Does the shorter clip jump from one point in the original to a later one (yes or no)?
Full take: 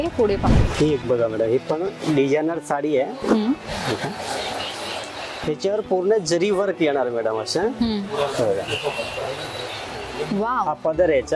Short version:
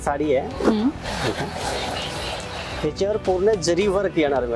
no